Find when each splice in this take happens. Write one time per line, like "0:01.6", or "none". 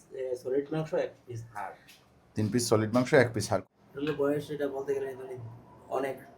0:03.5